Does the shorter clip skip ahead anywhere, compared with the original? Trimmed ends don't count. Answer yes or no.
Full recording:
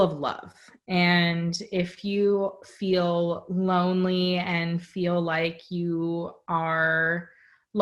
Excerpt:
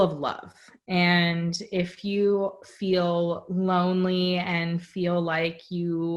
no